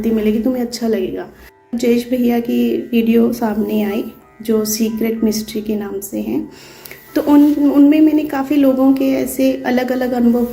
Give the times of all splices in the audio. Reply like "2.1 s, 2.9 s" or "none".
1.7 s